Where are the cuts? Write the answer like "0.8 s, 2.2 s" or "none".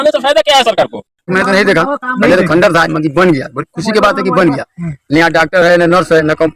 1.2 s